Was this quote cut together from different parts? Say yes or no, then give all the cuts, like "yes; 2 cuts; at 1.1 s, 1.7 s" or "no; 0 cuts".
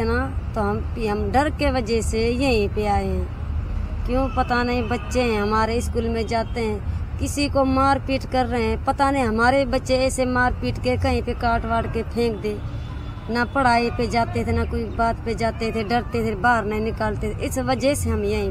no; 0 cuts